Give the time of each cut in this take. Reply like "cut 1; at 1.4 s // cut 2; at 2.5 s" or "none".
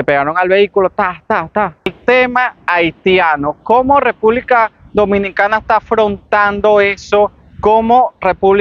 cut 1; at 2.0 s